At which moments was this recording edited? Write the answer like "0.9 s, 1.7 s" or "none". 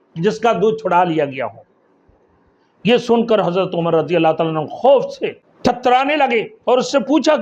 5.4 s